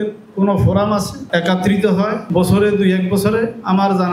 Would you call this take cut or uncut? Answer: uncut